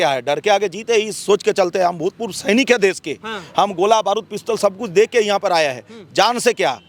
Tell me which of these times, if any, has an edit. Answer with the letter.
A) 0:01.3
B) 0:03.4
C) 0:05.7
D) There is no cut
D